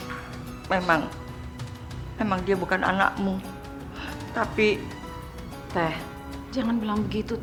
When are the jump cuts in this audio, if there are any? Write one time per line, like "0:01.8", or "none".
none